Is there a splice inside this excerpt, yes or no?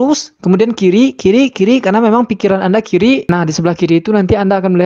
no